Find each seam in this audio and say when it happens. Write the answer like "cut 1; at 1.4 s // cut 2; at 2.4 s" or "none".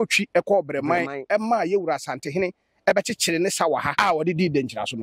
cut 1; at 3.9 s